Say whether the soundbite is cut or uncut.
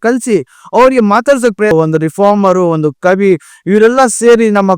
cut